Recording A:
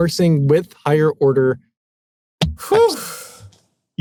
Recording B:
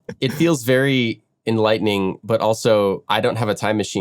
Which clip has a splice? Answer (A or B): B